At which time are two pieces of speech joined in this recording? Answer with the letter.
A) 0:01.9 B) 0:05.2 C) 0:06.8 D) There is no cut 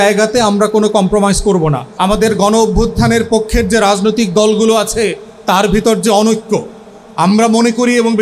A